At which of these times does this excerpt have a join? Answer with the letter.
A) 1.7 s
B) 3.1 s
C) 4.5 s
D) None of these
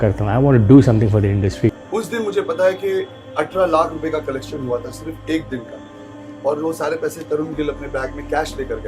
A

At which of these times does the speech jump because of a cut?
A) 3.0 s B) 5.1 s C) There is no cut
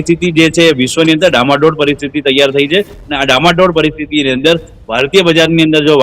C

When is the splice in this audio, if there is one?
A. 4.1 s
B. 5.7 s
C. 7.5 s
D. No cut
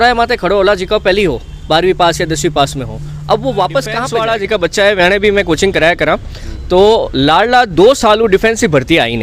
A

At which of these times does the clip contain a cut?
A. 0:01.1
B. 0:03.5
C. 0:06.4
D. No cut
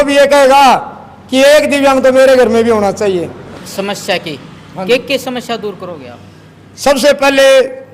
B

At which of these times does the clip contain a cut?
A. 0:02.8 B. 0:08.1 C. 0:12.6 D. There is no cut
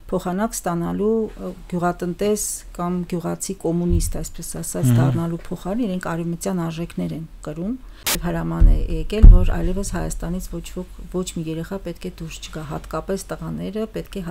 B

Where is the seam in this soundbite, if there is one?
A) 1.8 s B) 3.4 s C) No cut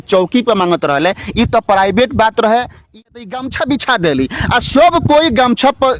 B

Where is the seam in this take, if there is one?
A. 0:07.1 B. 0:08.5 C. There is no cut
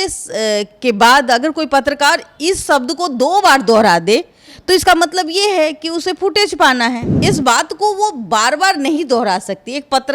A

